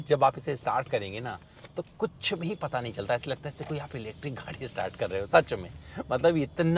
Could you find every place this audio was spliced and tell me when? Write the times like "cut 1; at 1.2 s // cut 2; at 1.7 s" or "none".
none